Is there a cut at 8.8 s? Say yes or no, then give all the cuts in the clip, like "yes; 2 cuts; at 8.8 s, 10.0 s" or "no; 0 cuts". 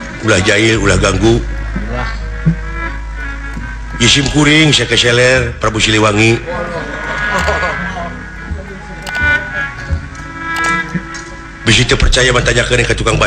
no; 0 cuts